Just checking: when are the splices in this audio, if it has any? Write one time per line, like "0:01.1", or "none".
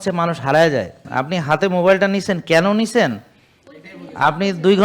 0:01.1